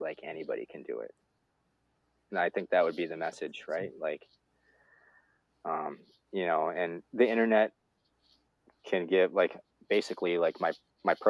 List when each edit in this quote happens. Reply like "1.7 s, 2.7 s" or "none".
none